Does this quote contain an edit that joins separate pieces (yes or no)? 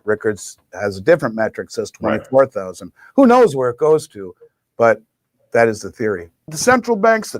yes